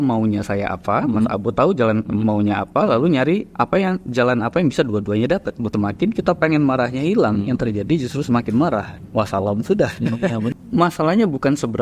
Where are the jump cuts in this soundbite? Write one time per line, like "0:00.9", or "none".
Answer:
0:05.6
0:10.6